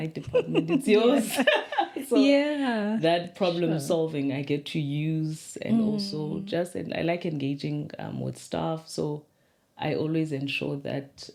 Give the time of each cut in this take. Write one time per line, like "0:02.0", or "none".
none